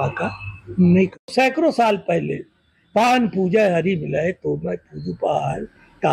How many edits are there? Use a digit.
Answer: 1